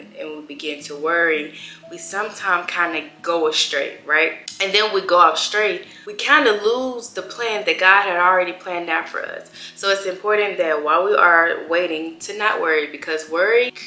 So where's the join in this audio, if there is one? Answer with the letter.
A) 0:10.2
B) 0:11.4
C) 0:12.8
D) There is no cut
D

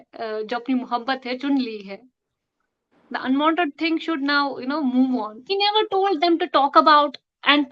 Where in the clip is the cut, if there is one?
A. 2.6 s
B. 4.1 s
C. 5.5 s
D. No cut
C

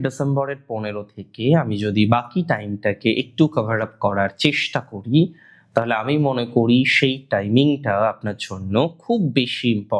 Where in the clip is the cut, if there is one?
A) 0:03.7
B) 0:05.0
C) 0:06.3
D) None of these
D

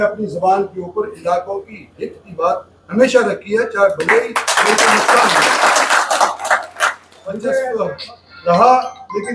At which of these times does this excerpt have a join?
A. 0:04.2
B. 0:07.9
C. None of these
B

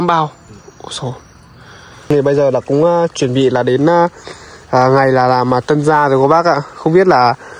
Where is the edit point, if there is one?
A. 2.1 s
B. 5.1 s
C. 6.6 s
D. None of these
A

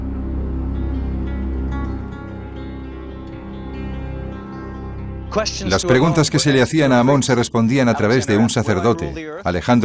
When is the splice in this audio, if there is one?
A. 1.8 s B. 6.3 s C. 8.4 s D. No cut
B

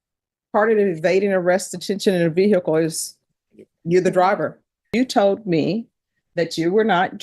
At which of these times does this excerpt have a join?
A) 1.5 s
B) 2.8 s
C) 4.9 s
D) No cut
C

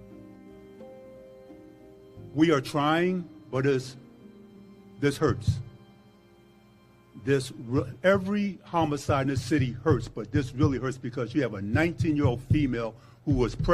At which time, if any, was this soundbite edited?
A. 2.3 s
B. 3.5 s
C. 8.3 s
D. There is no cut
A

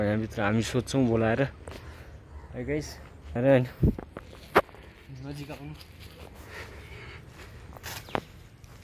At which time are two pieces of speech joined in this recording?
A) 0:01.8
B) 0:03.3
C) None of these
B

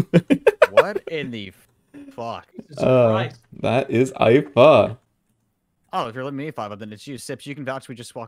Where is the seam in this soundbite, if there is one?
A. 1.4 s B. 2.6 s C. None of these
C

